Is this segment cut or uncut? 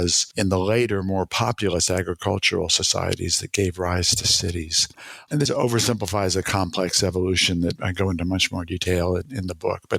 uncut